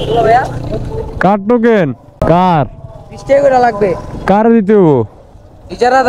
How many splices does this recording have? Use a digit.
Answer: 1